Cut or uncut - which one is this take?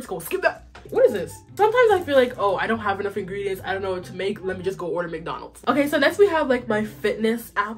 cut